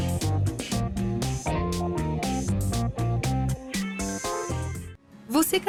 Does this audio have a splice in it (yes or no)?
no